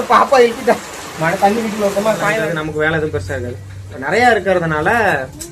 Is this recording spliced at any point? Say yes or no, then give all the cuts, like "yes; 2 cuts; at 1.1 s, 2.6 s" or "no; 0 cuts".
yes; 1 cut; at 2.4 s